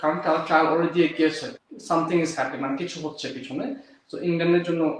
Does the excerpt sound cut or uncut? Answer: cut